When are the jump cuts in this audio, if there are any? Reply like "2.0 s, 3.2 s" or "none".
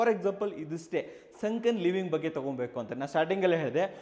none